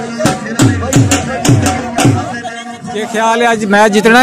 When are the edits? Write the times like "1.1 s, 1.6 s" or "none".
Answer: 3.1 s

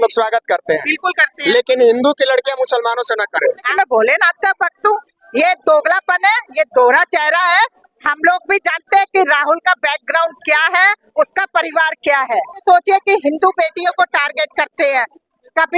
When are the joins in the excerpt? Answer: 3.7 s, 12.6 s

